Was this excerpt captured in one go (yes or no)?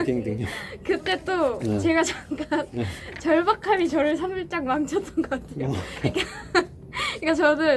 yes